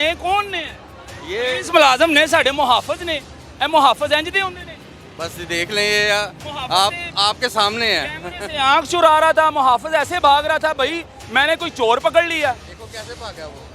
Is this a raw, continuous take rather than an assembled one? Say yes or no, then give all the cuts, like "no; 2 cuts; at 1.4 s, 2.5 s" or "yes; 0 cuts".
yes; 0 cuts